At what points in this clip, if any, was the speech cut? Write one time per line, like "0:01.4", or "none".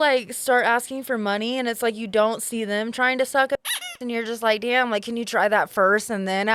none